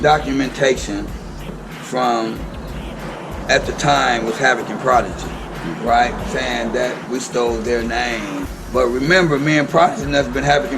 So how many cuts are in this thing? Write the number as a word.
one